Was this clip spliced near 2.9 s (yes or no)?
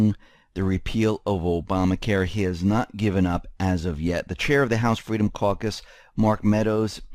yes